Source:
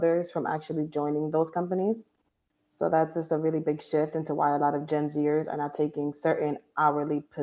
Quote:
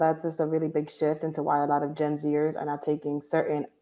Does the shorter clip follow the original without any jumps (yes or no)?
yes